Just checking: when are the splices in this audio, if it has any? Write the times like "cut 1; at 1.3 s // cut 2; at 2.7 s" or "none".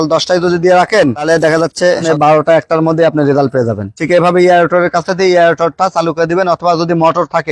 cut 1; at 2.0 s